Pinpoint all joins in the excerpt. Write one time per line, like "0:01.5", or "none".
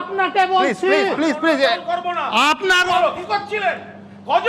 0:02.9